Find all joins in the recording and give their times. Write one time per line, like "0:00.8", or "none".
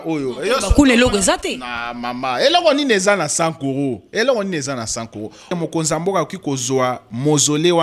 0:05.5